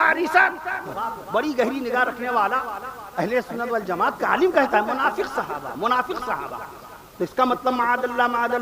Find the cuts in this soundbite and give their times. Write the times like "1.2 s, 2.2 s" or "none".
0.9 s